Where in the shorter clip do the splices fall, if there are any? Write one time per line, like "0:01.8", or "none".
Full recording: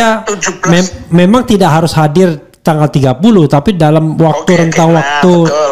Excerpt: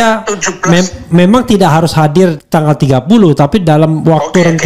0:02.4